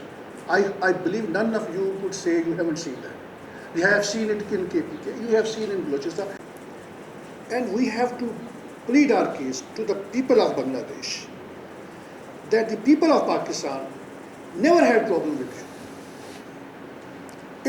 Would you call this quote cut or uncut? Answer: cut